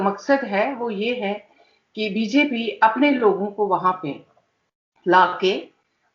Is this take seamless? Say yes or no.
yes